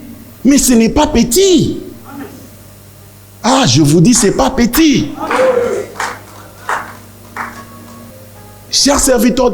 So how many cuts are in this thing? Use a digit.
1